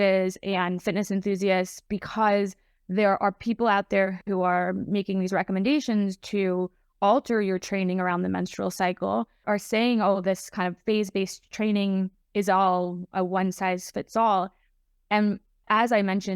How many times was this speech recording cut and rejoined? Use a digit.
0